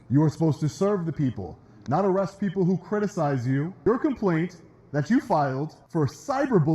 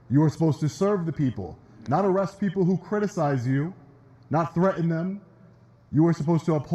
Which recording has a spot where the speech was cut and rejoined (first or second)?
first